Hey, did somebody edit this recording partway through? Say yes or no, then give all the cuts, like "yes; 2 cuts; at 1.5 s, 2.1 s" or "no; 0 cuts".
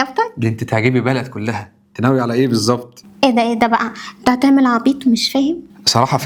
no; 0 cuts